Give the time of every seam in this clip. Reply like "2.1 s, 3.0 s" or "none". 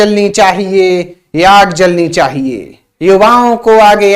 2.8 s